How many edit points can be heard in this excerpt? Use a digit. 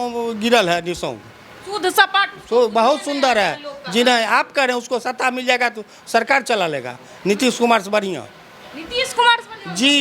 0